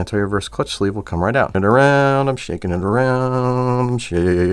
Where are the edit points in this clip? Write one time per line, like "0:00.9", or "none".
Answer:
0:01.5